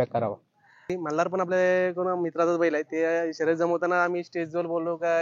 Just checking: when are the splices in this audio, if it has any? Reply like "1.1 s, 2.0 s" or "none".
0.9 s